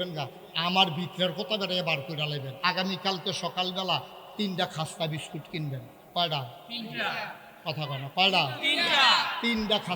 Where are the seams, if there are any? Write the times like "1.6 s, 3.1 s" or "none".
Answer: 2.5 s